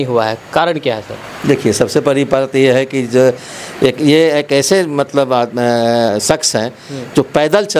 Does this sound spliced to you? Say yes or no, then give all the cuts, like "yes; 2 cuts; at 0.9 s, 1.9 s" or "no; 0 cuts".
no; 0 cuts